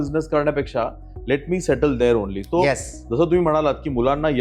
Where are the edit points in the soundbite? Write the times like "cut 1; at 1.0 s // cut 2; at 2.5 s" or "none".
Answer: none